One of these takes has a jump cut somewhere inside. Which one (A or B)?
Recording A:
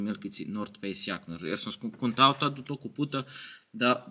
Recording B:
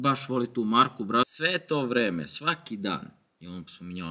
B